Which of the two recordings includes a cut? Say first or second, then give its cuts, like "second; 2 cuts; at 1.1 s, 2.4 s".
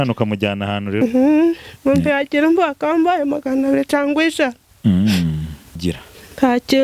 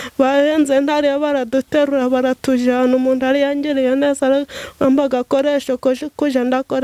first; 2 cuts; at 1.0 s, 5.8 s